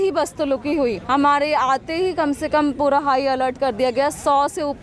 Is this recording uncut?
no; 1 cut; at 1.0 s

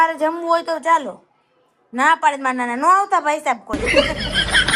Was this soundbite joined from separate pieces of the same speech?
yes; 1 cut; at 3.8 s

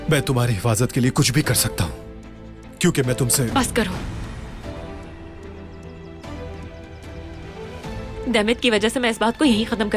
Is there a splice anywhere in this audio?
no; 0 cuts

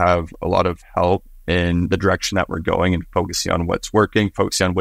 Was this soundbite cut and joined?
no; 0 cuts

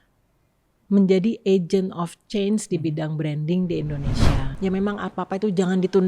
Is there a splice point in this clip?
yes; 1 cut; at 4.5 s

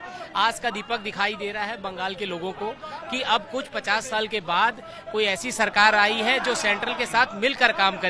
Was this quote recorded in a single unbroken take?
yes; 0 cuts

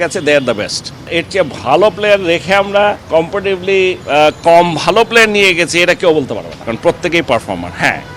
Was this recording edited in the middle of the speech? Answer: yes; 2 cuts; at 1.1 s, 6.5 s

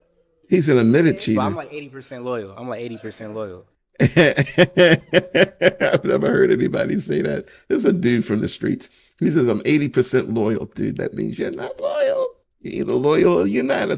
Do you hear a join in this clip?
no; 0 cuts

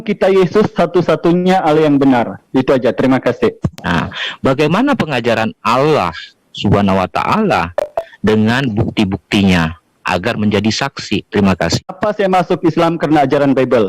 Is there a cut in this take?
yes; 2 cuts; at 3.7 s, 12.0 s

